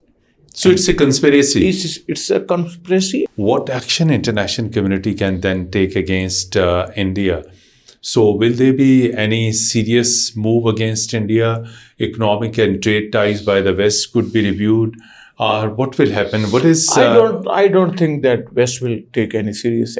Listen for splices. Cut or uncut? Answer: cut